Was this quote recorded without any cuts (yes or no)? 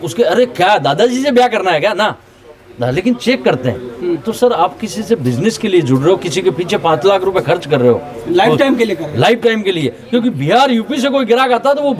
yes